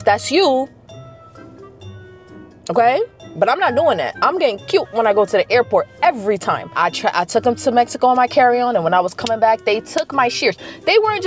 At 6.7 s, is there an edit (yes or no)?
yes